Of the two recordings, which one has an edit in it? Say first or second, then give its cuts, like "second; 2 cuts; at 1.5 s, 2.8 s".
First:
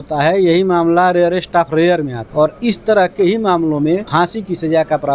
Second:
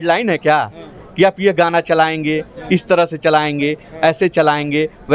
first; 2 cuts; at 2.2 s, 4.1 s